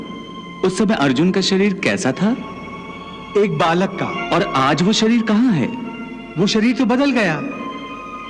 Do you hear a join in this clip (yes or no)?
yes